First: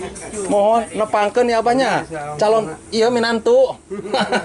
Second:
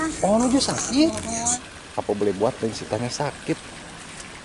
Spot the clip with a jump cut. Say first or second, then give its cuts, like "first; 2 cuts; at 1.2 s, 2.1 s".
second; 1 cut; at 1.6 s